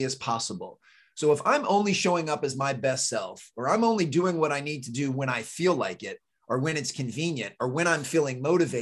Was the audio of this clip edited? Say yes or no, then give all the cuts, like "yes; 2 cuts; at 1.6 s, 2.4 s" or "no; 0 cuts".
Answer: no; 0 cuts